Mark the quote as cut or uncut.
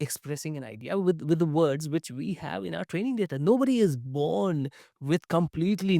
uncut